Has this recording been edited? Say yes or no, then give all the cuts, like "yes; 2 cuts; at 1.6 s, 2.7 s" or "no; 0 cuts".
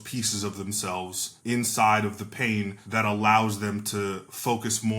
yes; 2 cuts; at 1.2 s, 2.8 s